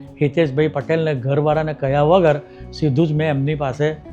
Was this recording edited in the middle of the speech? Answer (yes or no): no